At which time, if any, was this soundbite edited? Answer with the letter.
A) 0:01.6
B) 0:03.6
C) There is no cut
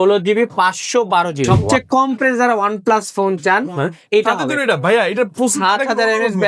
A